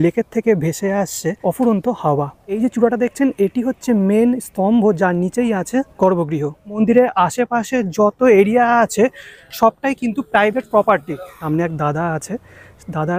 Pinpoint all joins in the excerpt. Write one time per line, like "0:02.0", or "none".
0:01.4
0:02.6
0:05.9
0:06.7
0:11.3